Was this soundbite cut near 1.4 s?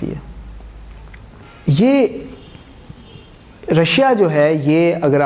yes; 1 cut; at 1.4 s

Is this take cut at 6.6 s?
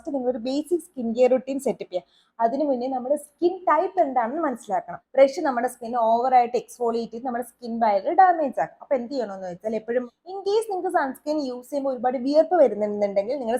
no; 2 cuts; at 5.0 s, 10.1 s

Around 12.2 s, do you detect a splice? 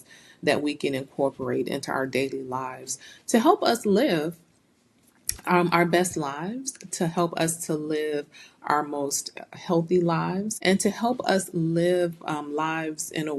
no; 1 cut; at 10.5 s

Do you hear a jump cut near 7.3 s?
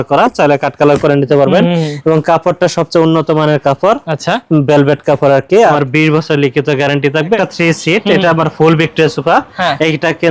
yes; 2 cuts; at 5.7 s, 7.3 s

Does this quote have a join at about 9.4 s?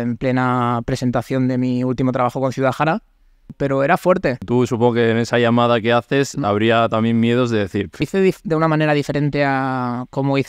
no; 3 cuts; at 3.5 s, 4.5 s, 8.1 s

